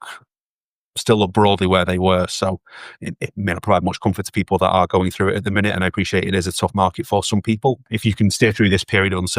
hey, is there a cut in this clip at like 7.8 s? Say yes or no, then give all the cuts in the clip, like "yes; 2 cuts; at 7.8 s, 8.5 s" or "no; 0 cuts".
yes; 1 cut; at 7.8 s